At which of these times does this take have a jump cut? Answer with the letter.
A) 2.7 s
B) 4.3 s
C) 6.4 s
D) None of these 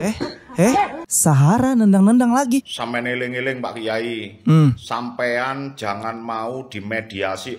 A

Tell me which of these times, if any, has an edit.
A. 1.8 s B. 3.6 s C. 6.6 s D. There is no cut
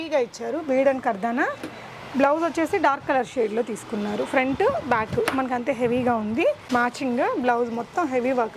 C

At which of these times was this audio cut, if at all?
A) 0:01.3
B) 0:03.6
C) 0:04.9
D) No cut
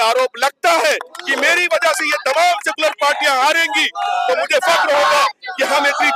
D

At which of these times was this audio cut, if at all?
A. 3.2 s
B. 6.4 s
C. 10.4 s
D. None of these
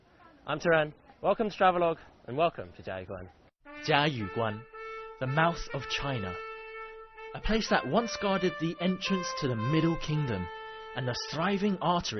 B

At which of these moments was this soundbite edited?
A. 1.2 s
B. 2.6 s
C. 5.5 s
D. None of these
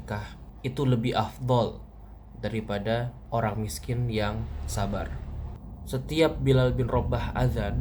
C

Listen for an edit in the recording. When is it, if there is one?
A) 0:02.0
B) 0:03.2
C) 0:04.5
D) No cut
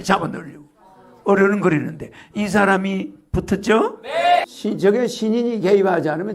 C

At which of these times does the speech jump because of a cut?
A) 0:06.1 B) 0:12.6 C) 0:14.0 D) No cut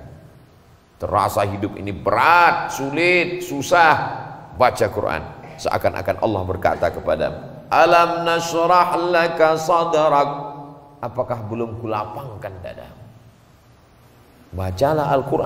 C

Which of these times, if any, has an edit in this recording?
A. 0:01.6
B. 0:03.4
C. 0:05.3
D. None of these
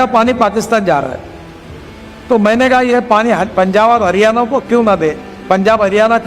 C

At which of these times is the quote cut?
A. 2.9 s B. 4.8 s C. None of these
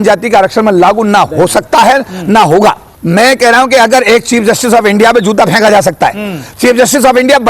A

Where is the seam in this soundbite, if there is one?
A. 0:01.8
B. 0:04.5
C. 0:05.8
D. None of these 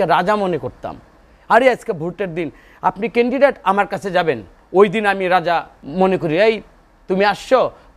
C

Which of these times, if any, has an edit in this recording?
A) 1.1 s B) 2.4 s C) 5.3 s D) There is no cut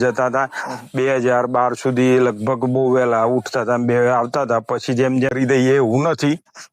C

